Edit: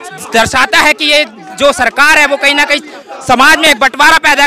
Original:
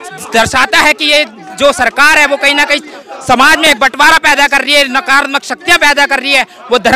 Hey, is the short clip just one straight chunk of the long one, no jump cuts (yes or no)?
yes